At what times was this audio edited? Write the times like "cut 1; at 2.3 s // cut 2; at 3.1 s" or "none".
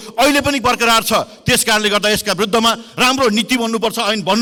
none